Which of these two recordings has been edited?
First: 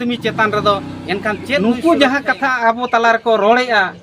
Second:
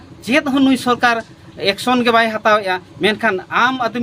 first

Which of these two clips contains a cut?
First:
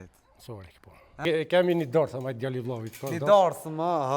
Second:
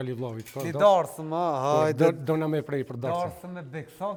first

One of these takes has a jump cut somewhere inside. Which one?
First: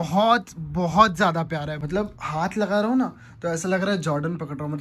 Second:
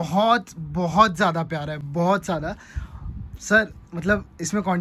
first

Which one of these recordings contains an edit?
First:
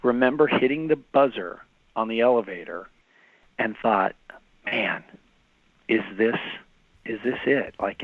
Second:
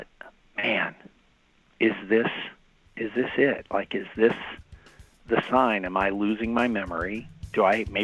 first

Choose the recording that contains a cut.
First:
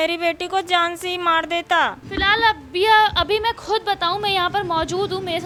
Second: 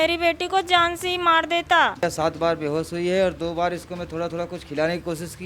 second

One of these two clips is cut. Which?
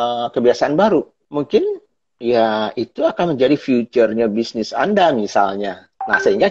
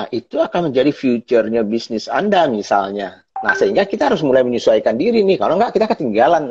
first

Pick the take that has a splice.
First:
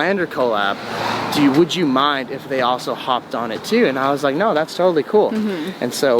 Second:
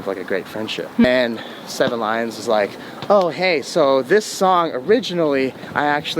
second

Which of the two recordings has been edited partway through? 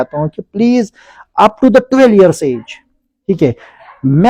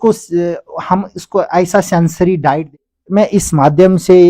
second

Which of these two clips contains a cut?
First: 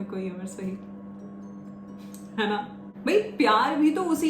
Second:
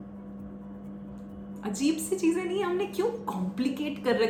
first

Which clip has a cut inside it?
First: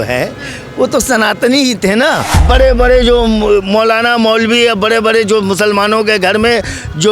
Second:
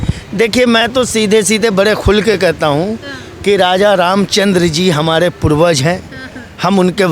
first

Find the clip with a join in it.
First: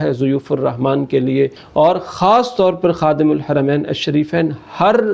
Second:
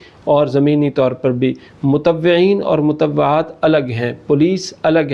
first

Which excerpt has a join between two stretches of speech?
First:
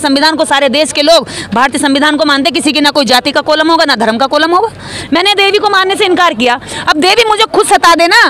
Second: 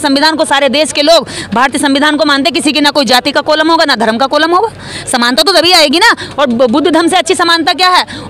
first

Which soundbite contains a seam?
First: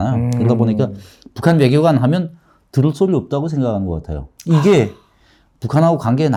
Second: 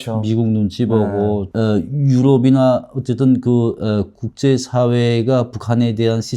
second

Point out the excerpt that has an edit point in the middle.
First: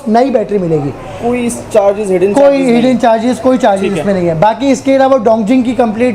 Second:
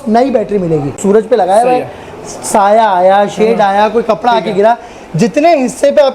second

